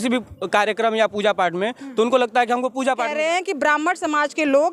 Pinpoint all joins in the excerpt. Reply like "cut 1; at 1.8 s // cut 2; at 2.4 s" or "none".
cut 1; at 3.1 s